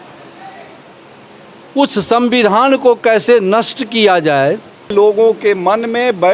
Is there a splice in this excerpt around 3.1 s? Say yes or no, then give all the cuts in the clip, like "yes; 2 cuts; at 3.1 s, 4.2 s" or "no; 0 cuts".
no; 1 cut; at 4.9 s